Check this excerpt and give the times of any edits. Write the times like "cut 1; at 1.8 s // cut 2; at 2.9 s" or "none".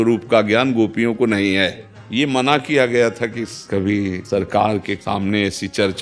cut 1; at 1.9 s // cut 2; at 4.0 s // cut 3; at 5.0 s